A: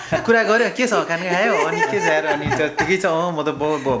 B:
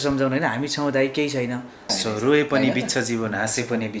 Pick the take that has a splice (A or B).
B